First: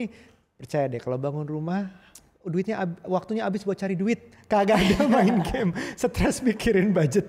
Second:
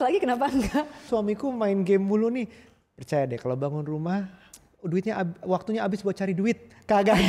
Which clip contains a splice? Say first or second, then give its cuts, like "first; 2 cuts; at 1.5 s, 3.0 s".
second; 1 cut; at 1.1 s